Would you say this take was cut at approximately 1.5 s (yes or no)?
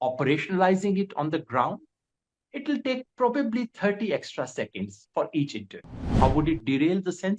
no